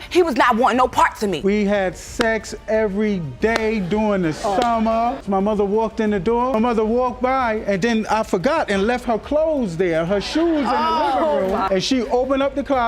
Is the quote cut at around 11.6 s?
yes; 3 cuts; at 1.4 s, 6.5 s, 11.6 s

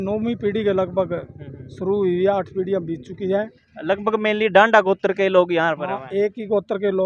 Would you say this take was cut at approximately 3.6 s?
yes; 1 cut; at 3.6 s

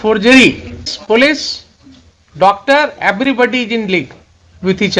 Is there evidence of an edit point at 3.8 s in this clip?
no; 1 cut; at 0.9 s

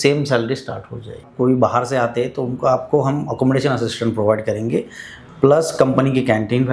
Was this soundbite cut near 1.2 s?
yes; 1 cut; at 1.2 s

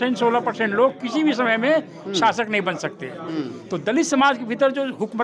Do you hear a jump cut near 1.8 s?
no; 1 cut; at 3.6 s

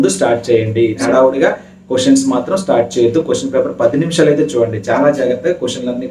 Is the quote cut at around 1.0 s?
yes; 1 cut; at 1.0 s

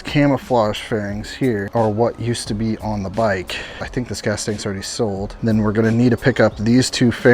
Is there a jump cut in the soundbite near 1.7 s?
yes; 3 cuts; at 1.7 s, 3.8 s, 5.3 s

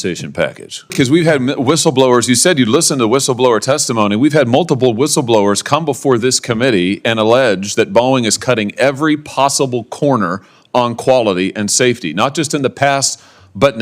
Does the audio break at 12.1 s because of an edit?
no; 1 cut; at 0.9 s

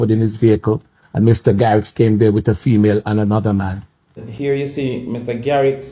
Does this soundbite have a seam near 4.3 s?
yes; 1 cut; at 4.3 s

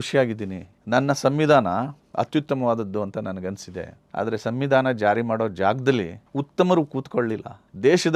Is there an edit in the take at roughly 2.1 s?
no; 0 cuts

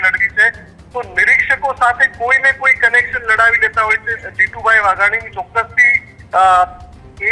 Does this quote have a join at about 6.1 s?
no; 1 cut; at 4.2 s

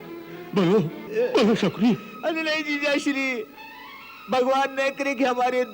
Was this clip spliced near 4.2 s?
no; 1 cut; at 1.0 s

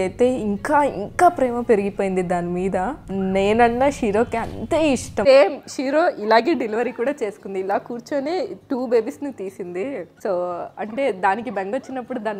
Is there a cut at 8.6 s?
no; 2 cuts; at 5.2 s, 10.1 s

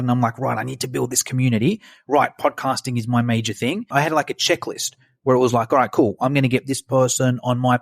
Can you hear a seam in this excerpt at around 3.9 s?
yes; 1 cut; at 3.9 s

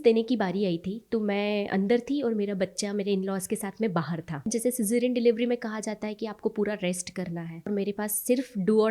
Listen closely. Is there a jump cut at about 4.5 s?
yes; 2 cuts; at 4.5 s, 7.7 s

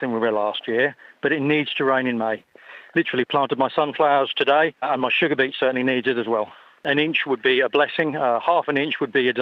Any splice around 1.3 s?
no; 4 cuts; at 2.7 s, 4.8 s, 6.8 s, 8.4 s

